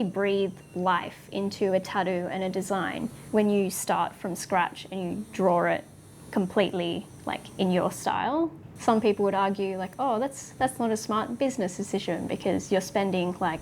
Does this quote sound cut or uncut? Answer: cut